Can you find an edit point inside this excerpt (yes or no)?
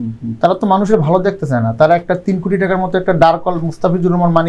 no